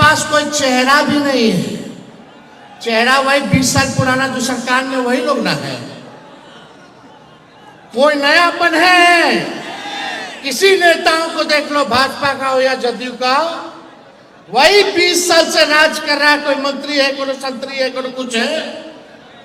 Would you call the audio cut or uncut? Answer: uncut